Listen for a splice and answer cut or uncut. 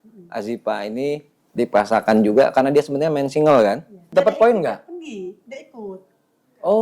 cut